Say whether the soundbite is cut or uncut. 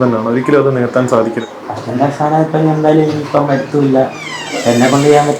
cut